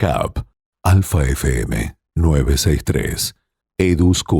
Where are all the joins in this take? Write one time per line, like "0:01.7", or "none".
none